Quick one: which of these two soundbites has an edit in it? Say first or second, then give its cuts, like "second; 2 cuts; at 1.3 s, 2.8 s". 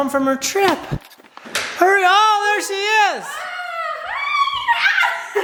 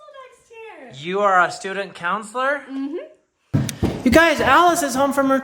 second; 1 cut; at 3.5 s